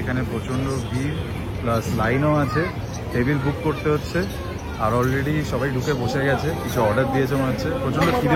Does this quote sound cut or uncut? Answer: uncut